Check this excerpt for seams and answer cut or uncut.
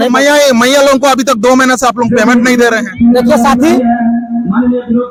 uncut